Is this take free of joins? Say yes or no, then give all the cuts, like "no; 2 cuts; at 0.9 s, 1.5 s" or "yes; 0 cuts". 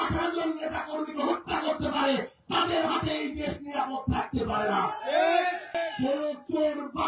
no; 1 cut; at 5.8 s